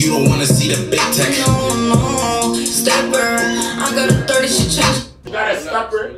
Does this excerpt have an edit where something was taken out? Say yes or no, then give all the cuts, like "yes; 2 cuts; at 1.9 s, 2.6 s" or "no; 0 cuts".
yes; 1 cut; at 5.2 s